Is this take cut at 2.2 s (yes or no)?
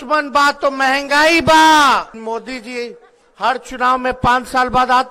yes